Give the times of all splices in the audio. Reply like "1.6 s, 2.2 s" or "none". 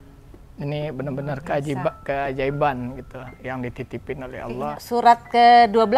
4.6 s